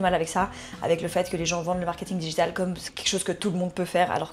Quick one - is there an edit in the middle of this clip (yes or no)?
no